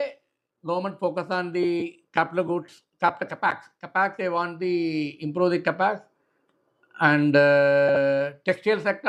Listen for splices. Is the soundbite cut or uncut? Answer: uncut